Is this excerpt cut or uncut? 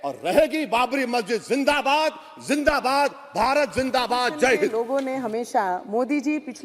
cut